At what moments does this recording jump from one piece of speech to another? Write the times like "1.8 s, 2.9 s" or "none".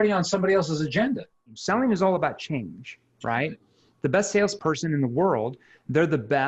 1.5 s, 4.6 s